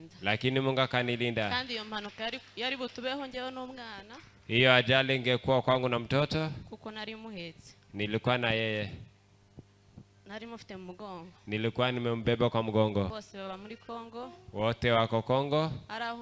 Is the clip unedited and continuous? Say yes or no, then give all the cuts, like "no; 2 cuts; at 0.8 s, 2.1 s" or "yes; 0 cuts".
no; 1 cut; at 13.1 s